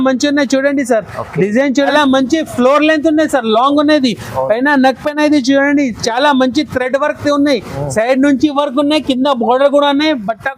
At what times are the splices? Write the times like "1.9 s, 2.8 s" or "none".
1.9 s